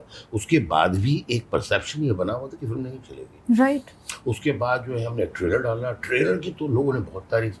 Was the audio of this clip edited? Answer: no; 0 cuts

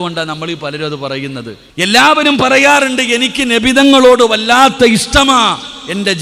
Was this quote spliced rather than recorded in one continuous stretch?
yes; 1 cut; at 1.6 s

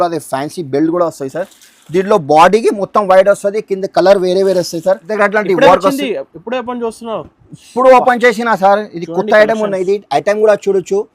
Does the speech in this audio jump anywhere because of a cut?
yes; 1 cut; at 5.1 s

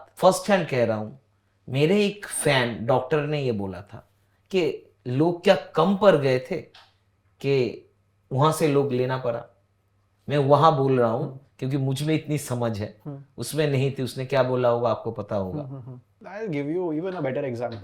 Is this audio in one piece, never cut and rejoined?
yes; 0 cuts

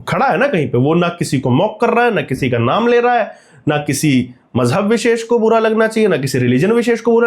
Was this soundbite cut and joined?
no; 0 cuts

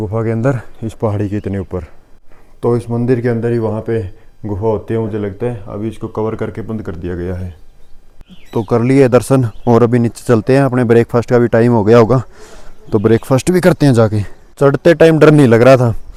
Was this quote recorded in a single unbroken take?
yes; 0 cuts

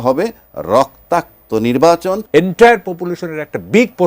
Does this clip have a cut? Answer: yes; 1 cut; at 2.2 s

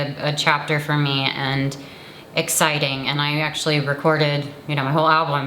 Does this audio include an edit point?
no; 0 cuts

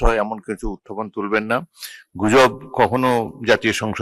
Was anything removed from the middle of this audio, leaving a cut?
no; 0 cuts

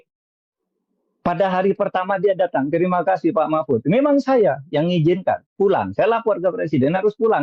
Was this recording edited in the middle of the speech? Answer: no; 0 cuts

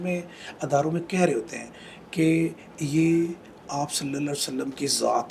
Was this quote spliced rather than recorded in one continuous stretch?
no; 0 cuts

